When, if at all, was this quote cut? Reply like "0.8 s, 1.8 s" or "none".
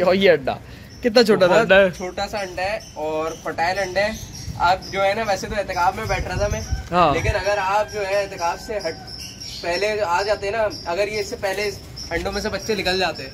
none